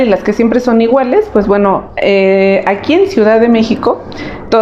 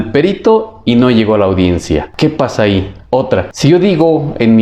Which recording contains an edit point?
second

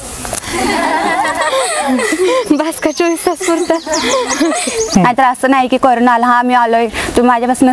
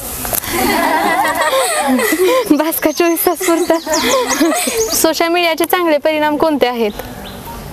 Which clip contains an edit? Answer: first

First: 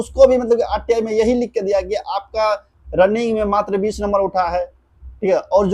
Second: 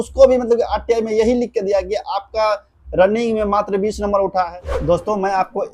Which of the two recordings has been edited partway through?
second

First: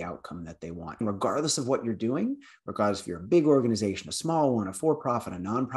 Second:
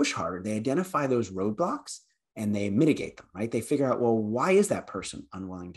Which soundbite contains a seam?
first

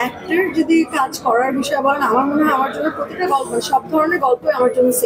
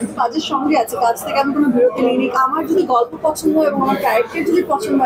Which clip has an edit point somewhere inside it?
second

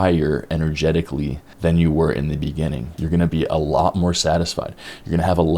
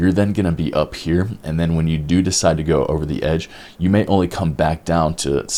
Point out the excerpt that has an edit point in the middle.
first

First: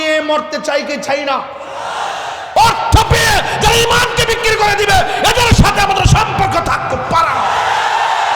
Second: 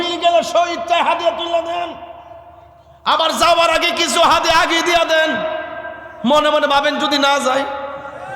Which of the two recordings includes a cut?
first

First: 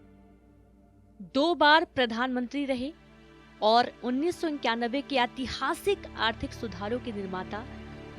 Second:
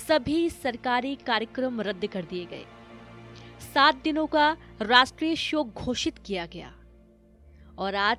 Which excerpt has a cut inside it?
first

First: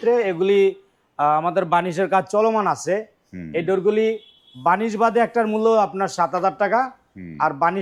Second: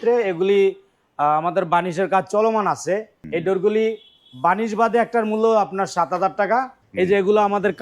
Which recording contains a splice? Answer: second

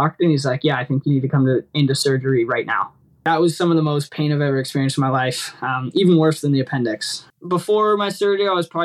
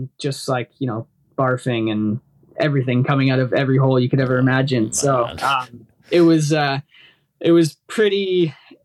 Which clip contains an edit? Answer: first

